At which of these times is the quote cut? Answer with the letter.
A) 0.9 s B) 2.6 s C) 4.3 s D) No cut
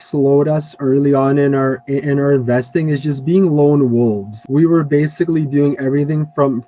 C